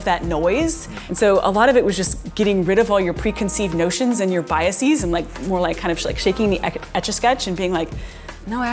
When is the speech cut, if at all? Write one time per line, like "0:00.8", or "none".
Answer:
none